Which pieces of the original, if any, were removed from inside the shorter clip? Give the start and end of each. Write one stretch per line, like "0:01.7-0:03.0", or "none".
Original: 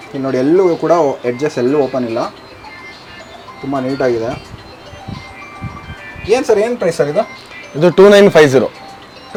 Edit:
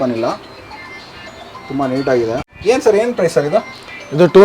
0:04.5-0:06.2

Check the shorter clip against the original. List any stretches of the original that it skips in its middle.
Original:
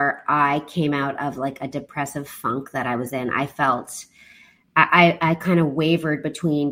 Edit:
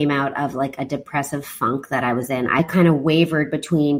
0:03.4-0:05.3

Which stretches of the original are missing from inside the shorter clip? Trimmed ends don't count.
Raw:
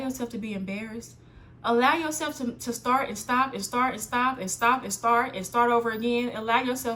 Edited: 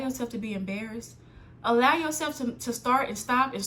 none

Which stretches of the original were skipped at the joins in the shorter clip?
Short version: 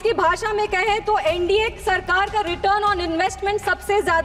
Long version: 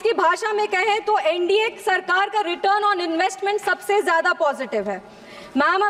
none

